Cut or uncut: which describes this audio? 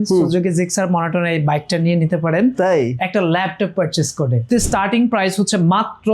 cut